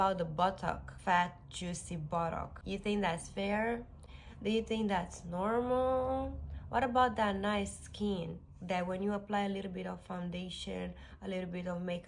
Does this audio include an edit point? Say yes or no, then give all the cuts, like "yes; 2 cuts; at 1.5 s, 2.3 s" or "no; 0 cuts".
yes; 2 cuts; at 1.0 s, 2.6 s